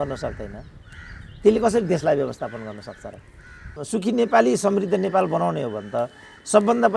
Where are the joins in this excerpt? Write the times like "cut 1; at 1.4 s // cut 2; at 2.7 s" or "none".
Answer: cut 1; at 3.7 s